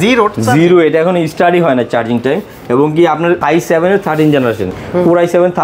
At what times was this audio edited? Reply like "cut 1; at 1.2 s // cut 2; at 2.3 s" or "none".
none